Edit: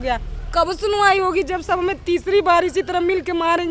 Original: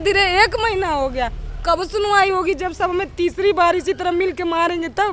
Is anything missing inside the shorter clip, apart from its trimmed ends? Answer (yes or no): no